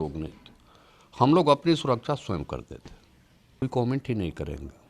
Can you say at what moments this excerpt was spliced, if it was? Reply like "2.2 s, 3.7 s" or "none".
3.6 s